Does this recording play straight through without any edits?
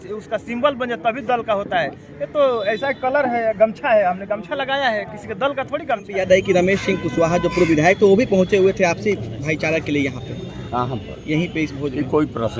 no; 1 cut; at 6.1 s

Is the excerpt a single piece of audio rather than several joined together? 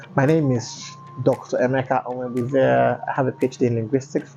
yes; 0 cuts

